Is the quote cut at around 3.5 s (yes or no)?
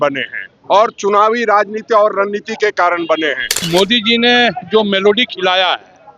yes